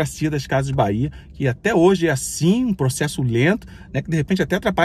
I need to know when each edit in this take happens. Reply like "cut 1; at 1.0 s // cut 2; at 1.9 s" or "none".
none